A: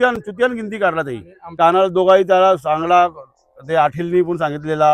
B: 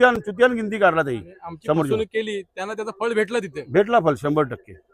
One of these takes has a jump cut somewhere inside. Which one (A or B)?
A